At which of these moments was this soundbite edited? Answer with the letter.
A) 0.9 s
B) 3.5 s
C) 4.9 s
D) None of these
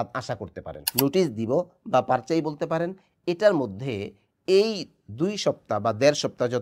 A